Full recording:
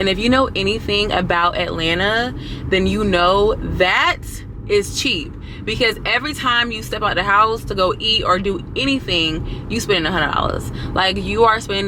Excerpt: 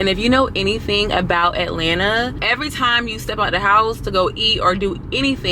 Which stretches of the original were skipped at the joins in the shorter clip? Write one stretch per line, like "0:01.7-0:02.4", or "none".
0:02.4-0:06.0